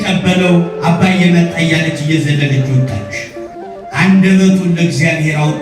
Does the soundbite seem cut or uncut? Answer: cut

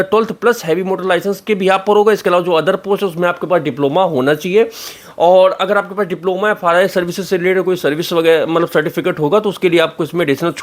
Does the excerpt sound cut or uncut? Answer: uncut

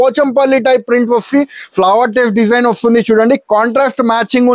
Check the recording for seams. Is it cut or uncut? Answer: uncut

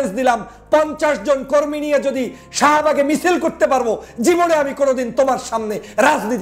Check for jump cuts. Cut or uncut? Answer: uncut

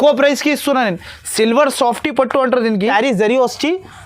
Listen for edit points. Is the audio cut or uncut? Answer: cut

